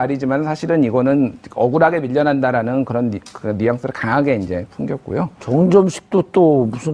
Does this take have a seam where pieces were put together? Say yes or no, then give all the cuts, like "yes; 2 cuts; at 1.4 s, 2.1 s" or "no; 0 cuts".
no; 0 cuts